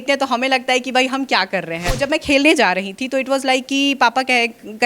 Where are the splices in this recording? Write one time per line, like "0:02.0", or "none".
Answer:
0:02.0